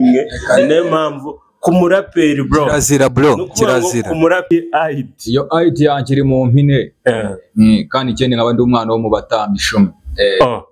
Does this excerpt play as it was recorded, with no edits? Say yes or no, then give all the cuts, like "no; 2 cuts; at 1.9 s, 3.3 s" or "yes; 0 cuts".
no; 1 cut; at 4.5 s